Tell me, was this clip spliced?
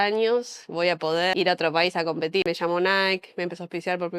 yes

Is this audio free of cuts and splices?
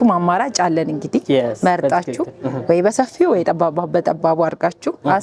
yes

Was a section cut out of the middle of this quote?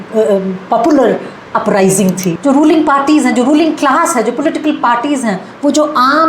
yes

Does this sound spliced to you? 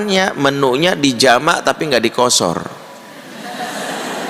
no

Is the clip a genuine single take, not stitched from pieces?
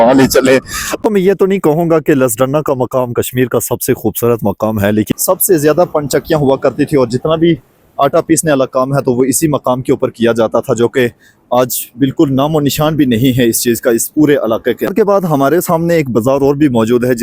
no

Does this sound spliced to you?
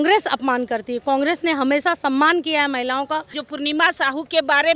yes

